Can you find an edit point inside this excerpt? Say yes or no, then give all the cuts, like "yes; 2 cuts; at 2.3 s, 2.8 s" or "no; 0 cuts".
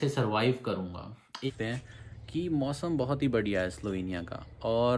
yes; 1 cut; at 1.5 s